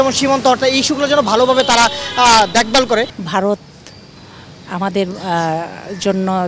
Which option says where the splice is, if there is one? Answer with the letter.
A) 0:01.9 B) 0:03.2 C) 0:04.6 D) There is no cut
B